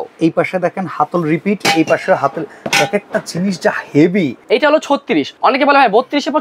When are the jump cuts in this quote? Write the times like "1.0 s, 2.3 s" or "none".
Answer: 4.4 s, 5.3 s